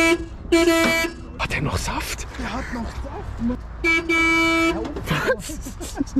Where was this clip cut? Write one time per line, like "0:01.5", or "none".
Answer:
0:01.4
0:03.6